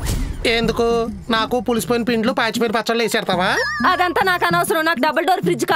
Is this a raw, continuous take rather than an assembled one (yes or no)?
yes